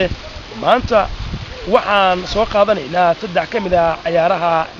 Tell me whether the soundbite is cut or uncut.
uncut